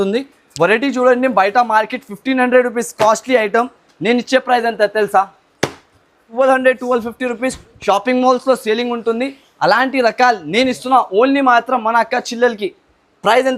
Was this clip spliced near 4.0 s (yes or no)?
no